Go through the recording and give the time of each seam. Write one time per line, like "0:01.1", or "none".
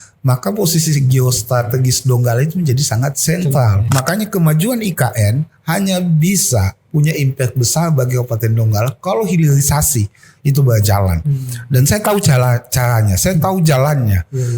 0:03.8

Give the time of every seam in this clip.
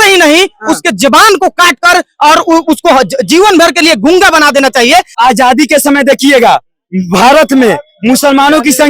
0:05.1

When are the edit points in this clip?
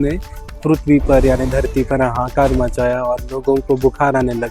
none

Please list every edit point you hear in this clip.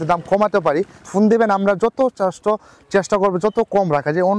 0:01.0

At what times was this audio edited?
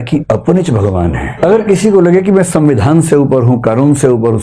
0:01.3

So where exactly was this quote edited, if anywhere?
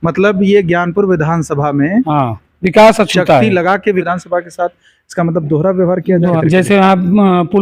0:04.1
0:06.4

